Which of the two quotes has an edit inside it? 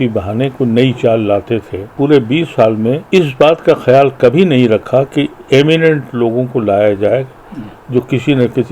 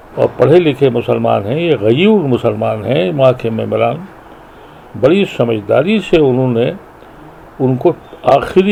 first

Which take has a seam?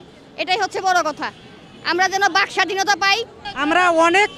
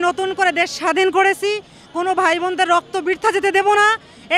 first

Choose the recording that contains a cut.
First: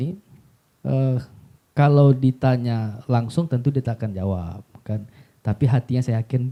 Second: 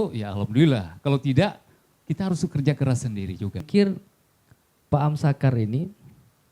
second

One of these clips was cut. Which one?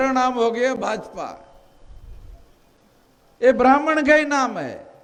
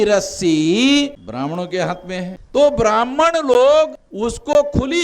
second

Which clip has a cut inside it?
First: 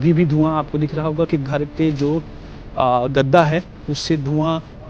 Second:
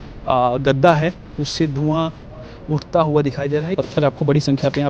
second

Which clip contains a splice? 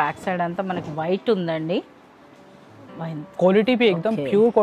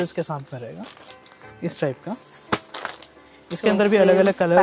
first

